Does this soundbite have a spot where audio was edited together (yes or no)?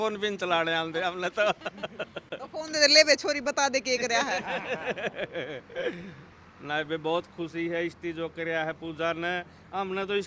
no